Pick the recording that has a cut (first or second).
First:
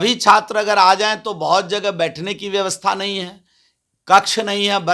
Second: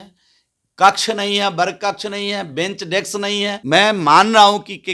second